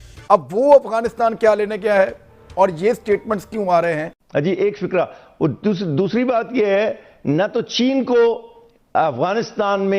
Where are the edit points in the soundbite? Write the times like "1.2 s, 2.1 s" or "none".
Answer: 4.2 s

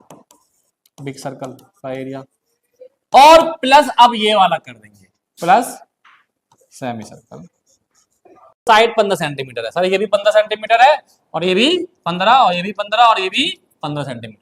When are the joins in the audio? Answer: 8.6 s

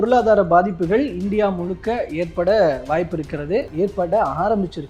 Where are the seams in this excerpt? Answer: 3.7 s

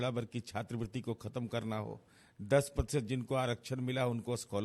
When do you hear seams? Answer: none

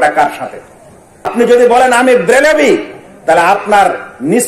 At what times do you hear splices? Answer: 1.3 s

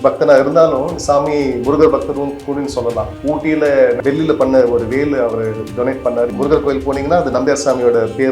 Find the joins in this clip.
3.1 s, 4.0 s, 6.3 s

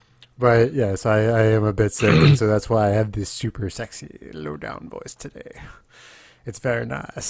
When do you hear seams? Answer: none

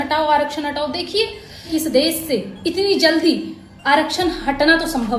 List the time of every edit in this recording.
1.7 s

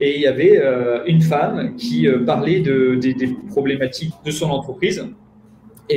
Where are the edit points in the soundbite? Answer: 4.0 s

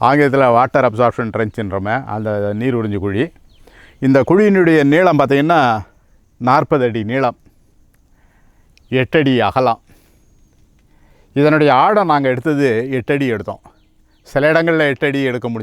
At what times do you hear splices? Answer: none

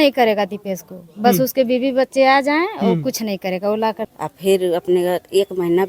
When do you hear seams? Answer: 4.1 s

